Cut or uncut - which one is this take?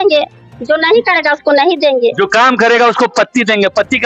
uncut